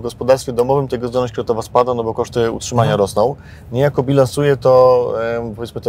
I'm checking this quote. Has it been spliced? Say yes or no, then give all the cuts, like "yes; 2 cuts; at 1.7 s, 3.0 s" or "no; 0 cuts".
no; 0 cuts